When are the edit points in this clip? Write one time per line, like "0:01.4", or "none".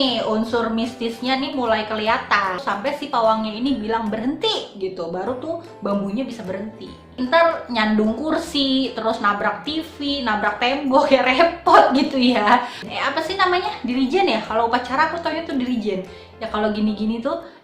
0:02.6
0:07.1
0:12.8